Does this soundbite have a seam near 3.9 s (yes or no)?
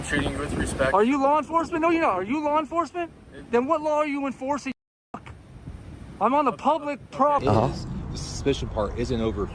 no